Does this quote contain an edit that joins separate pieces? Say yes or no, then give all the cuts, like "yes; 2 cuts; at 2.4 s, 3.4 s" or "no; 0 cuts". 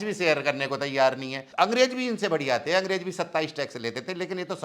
yes; 1 cut; at 1.4 s